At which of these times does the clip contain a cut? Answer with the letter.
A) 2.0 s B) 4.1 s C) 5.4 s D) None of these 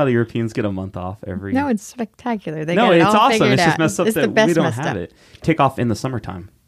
C